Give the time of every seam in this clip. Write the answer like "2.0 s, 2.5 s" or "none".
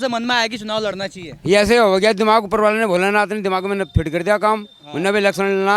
none